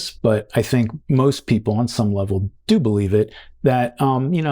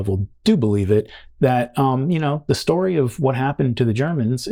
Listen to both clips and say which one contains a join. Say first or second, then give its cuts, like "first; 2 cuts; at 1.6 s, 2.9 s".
first; 1 cut; at 1.0 s